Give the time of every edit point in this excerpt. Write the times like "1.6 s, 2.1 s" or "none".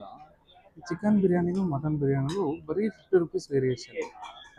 none